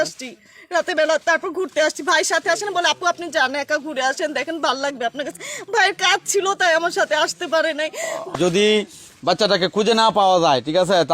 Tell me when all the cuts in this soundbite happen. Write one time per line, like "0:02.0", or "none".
0:08.3